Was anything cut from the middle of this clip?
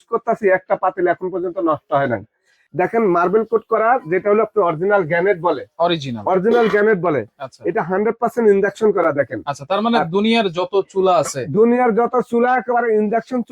yes; 1 cut; at 2.5 s

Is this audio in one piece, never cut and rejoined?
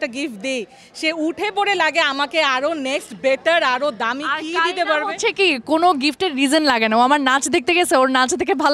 yes; 0 cuts

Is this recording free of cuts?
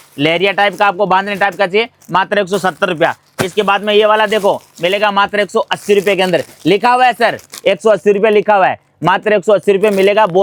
yes; 0 cuts

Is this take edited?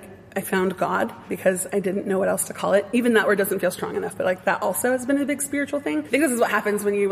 yes; 2 cuts; at 1.3 s, 6.0 s

